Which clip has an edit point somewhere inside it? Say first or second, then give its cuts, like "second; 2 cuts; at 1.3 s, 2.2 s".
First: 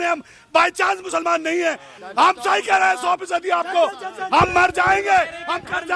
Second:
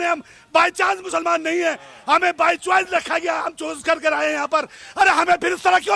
first; 1 cut; at 1.9 s